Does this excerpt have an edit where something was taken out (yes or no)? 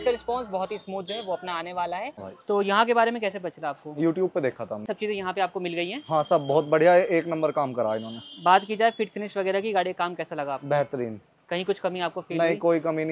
yes